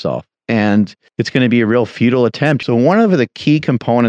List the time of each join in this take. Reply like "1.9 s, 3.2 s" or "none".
1.0 s, 2.6 s